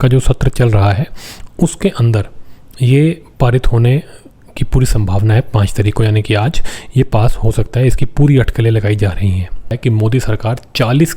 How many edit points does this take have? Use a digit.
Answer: 1